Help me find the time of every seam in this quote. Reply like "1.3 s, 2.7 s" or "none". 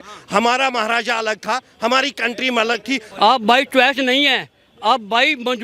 3.1 s